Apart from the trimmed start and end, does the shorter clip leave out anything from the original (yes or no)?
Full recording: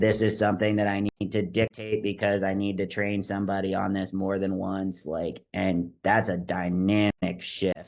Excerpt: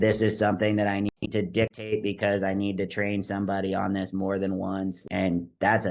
yes